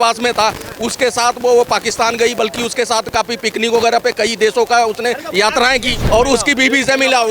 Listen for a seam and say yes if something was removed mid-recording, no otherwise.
yes